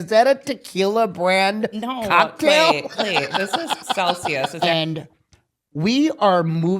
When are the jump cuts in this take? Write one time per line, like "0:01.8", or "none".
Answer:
0:04.6